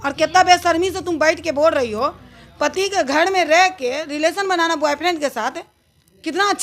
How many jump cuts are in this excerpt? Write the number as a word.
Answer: zero